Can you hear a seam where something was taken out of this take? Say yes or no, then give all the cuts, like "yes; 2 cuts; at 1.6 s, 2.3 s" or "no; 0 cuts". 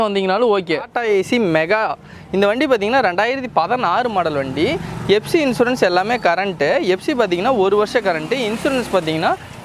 yes; 1 cut; at 0.9 s